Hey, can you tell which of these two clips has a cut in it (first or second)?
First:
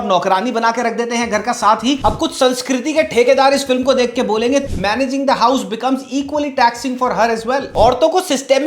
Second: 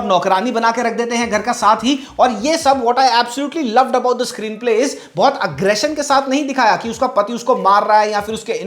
first